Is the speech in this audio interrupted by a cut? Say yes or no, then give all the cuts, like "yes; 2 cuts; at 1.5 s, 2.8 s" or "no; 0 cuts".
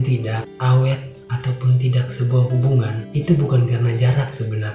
no; 0 cuts